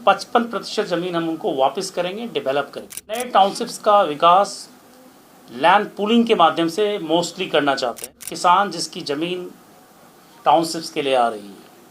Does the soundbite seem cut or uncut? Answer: cut